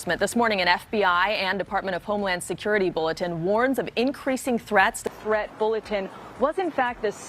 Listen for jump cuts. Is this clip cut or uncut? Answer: cut